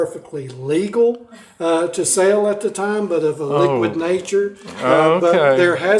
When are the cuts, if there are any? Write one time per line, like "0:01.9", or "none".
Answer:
none